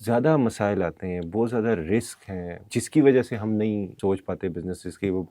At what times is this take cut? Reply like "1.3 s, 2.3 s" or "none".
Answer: 2.6 s, 3.9 s